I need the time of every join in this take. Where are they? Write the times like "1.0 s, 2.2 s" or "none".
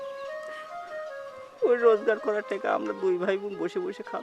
1.3 s

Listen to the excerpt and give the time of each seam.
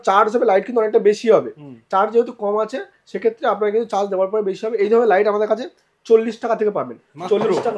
none

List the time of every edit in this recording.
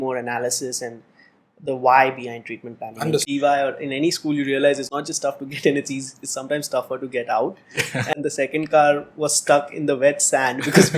3.3 s, 8.2 s

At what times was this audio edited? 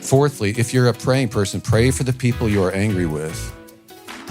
1.0 s

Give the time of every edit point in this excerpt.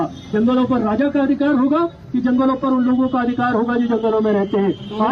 none

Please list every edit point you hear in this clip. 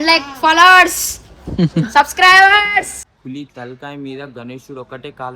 3.0 s

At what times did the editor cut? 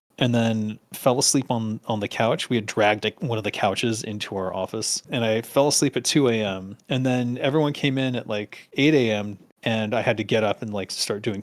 5.1 s

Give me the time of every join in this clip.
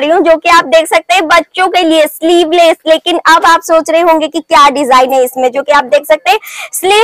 none

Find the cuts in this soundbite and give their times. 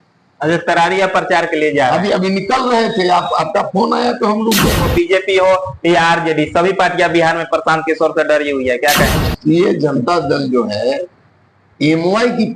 4.9 s, 9.3 s

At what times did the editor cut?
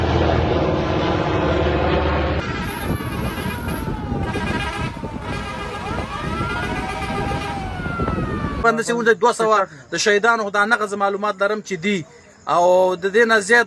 2.4 s, 8.6 s

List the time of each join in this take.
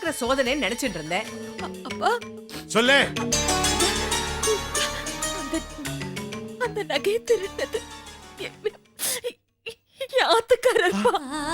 1.5 s

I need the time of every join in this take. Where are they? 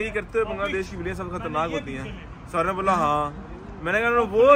none

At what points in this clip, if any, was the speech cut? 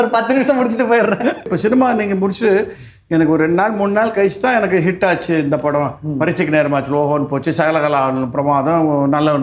1.5 s

